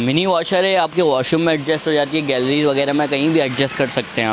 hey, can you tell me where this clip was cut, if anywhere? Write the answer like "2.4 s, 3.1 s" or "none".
none